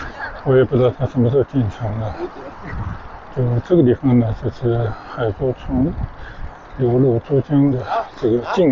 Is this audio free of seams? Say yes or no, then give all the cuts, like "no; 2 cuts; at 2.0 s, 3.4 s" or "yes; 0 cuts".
yes; 0 cuts